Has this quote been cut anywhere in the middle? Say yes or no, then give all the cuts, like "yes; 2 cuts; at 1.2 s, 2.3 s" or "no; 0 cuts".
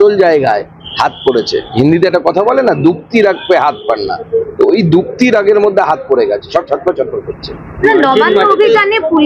no; 0 cuts